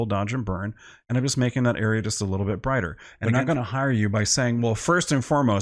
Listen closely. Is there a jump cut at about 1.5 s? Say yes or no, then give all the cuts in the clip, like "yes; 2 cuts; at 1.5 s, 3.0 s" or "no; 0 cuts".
no; 1 cut; at 3.1 s